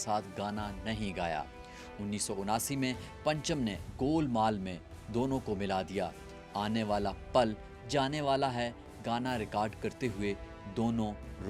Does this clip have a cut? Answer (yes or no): no